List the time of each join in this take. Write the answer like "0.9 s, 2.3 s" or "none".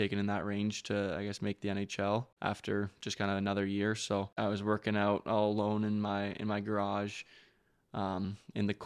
2.3 s, 4.3 s